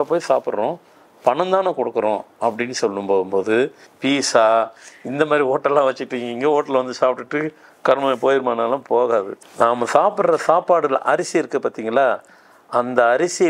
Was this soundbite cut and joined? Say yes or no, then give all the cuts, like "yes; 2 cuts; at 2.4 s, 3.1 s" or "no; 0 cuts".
yes; 2 cuts; at 3.9 s, 9.3 s